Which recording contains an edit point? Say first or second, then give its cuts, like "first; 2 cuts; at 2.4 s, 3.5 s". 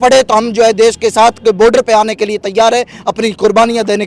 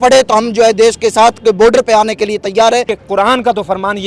second; 1 cut; at 2.9 s